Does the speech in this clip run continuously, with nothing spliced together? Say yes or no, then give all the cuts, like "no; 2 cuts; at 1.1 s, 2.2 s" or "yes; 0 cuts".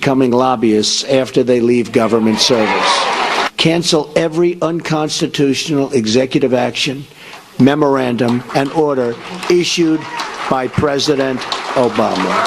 no; 1 cut; at 6.6 s